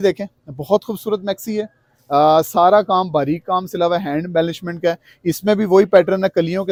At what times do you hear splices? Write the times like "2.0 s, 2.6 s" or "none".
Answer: none

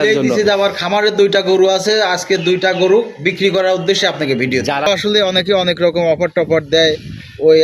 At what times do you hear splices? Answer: 4.9 s

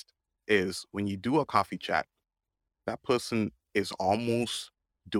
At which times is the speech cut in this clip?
2.8 s

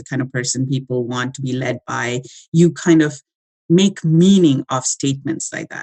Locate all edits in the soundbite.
none

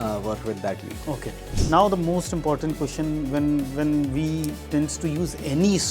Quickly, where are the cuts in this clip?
1.4 s

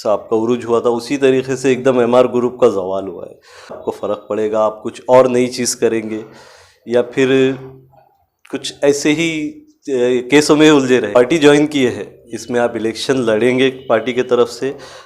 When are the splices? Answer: 3.8 s, 11.2 s

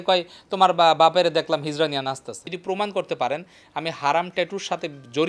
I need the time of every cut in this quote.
2.5 s

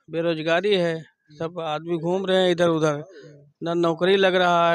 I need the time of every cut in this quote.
none

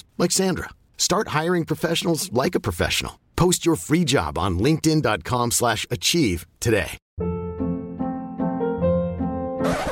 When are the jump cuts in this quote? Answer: 7.0 s

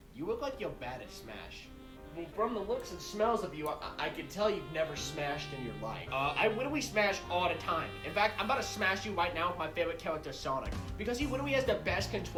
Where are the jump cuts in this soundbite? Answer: none

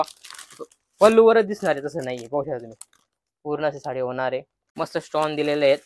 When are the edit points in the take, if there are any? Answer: 4.6 s

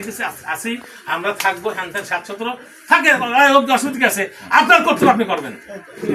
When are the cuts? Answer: none

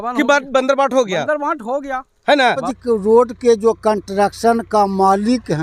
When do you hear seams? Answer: 2.7 s

